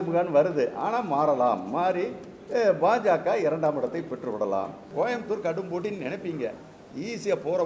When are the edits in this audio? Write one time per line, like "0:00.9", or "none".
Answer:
0:04.9